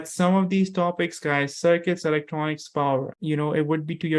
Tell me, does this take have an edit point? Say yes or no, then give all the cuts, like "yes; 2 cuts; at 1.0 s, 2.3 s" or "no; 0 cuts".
yes; 1 cut; at 3.1 s